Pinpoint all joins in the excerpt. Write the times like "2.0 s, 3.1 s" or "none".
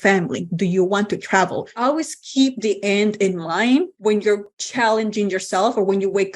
1.7 s, 4.2 s